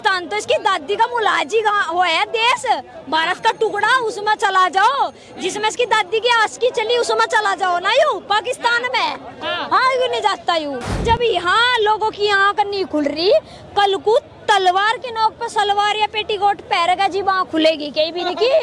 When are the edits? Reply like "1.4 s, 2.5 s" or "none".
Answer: 11.0 s